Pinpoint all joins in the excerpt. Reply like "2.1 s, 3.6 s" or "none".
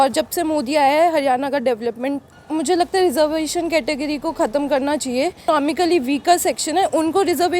2.3 s, 5.4 s